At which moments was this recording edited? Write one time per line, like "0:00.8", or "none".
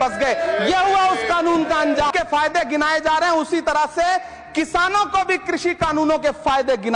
0:02.1